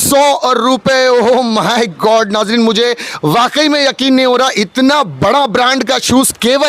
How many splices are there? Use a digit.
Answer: 0